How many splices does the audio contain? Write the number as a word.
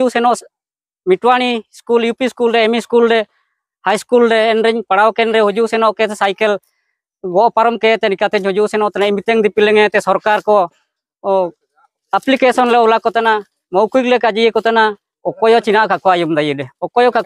zero